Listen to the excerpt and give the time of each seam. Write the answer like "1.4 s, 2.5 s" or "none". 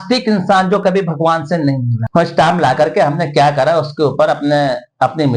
1.9 s